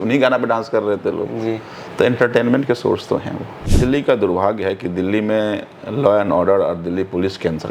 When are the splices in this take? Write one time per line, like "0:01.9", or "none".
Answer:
0:03.6